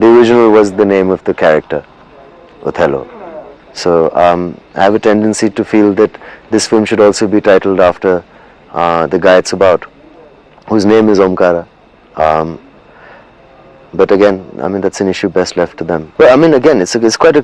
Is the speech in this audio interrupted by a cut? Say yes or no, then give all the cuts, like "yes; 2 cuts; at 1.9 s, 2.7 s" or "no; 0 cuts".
yes; 1 cut; at 16.1 s